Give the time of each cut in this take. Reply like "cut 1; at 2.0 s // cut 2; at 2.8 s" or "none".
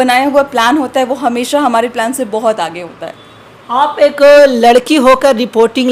none